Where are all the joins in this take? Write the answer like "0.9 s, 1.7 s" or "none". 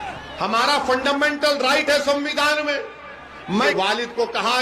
3.7 s